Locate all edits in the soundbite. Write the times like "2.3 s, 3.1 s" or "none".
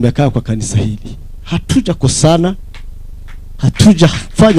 none